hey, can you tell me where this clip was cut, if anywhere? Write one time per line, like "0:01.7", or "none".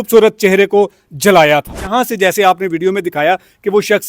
0:01.9